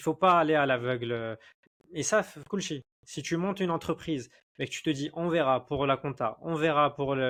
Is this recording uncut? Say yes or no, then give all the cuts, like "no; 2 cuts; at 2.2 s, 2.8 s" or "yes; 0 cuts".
yes; 0 cuts